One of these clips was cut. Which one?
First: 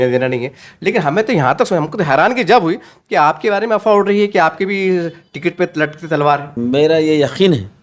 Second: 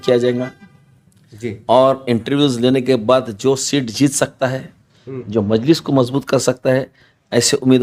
first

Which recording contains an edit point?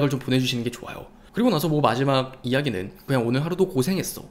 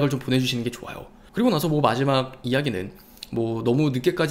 first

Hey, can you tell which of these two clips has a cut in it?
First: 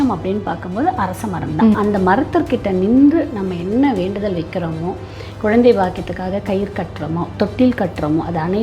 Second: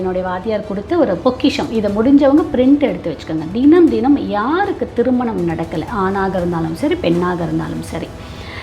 first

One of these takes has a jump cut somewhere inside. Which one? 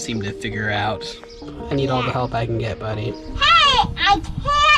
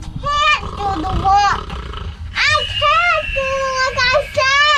first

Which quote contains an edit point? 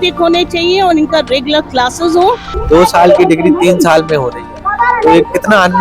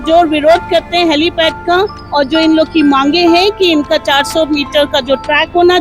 first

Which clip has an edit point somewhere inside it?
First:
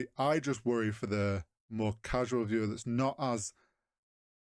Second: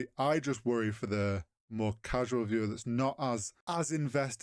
second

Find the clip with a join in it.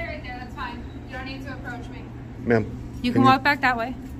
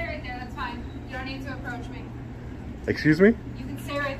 first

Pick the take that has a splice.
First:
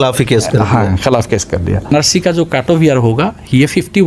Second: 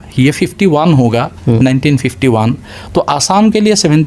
first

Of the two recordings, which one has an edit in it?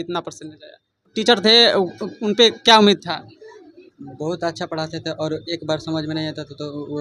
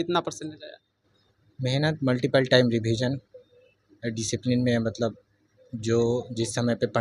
first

